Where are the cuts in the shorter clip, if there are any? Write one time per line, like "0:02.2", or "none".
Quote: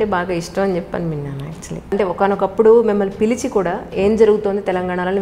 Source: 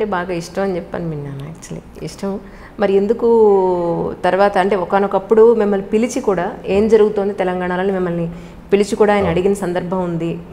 0:01.9